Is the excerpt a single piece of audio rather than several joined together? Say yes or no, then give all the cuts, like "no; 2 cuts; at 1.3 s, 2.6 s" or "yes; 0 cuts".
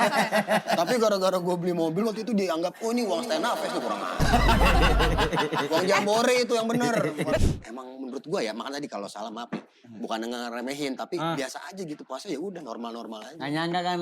no; 1 cut; at 7.4 s